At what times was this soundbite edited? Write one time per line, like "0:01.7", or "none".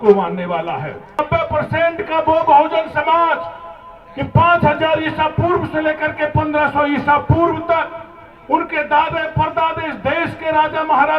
0:01.2